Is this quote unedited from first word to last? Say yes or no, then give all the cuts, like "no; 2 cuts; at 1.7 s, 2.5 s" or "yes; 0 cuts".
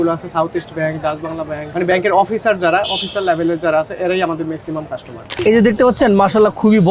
no; 2 cuts; at 1.6 s, 5.3 s